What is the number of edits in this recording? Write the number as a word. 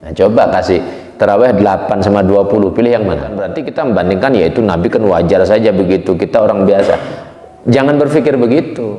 one